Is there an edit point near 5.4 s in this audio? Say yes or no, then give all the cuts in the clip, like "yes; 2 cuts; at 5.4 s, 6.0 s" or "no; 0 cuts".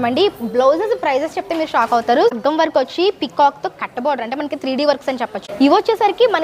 yes; 2 cuts; at 2.3 s, 5.4 s